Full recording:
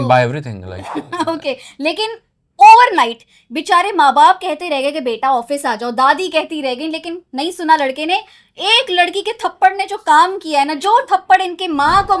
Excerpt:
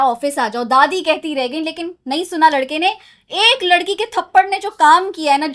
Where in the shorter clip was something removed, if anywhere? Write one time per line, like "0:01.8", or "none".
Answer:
none